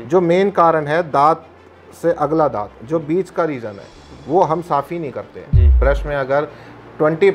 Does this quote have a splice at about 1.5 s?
no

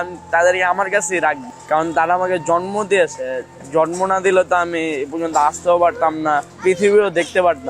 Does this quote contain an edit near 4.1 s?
no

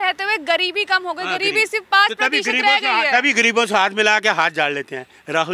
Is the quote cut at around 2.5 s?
no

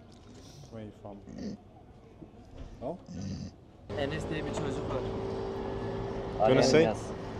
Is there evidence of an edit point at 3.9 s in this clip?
yes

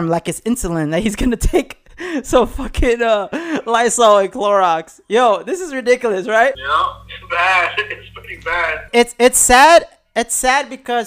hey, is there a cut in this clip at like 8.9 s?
yes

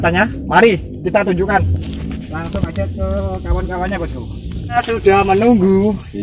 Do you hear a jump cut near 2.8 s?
no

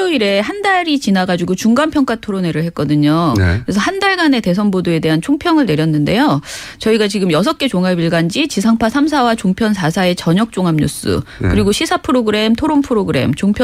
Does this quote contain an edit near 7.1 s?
no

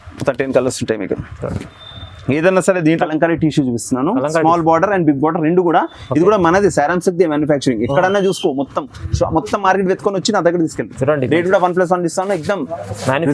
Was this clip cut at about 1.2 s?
no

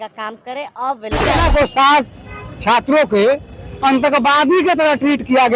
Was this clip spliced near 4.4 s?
no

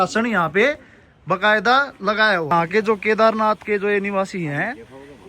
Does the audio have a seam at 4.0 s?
no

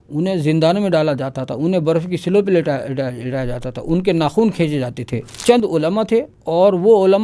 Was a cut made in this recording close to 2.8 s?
no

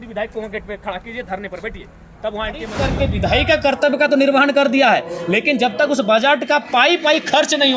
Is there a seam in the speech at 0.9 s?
no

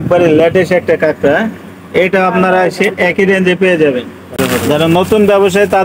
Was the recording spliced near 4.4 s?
yes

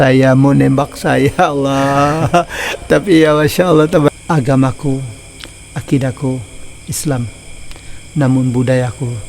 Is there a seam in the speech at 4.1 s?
yes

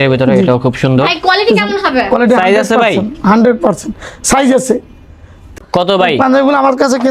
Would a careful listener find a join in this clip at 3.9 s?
no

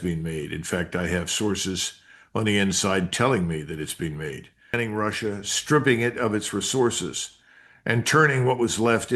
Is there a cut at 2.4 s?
no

